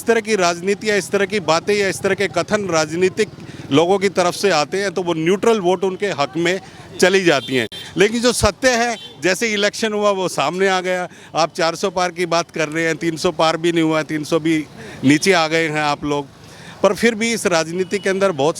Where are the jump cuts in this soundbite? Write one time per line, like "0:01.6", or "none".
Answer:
none